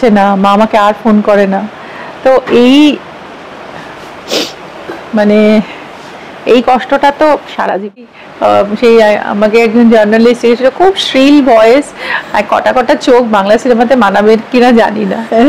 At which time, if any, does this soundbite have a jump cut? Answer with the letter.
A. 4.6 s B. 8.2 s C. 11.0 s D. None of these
B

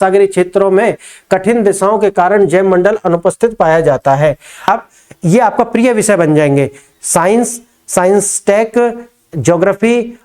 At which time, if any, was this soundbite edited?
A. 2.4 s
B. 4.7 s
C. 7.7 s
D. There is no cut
B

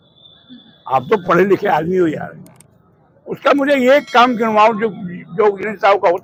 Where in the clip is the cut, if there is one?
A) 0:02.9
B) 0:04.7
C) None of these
C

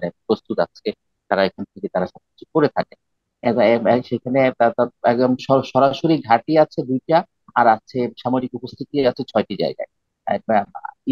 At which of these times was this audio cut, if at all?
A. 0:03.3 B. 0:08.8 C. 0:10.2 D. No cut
D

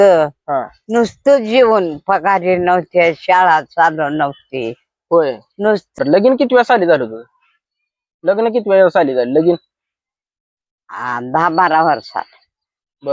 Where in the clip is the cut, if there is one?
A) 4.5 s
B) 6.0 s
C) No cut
B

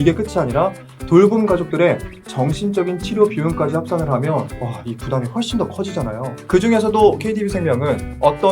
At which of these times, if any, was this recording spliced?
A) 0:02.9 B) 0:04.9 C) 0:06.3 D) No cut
C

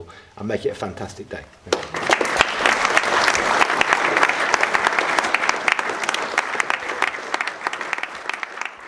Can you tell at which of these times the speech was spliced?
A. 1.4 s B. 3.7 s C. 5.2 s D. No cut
D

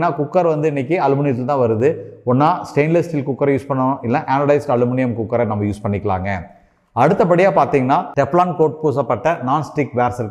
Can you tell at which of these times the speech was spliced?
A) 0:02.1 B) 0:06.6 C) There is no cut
C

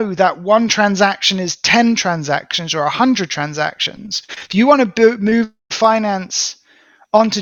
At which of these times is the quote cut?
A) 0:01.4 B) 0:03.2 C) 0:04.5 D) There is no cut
D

